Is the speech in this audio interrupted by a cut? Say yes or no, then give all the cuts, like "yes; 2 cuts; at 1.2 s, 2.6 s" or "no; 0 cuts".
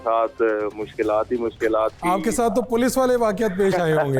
no; 0 cuts